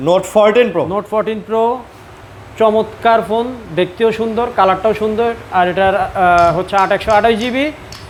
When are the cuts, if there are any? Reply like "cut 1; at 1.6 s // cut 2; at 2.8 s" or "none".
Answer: none